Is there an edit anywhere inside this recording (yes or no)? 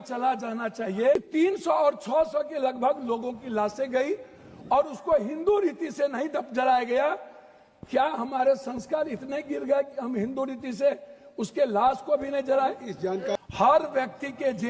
yes